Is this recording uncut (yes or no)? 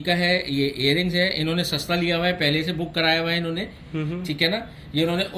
yes